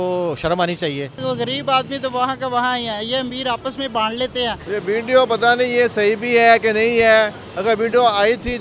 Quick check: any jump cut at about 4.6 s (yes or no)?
yes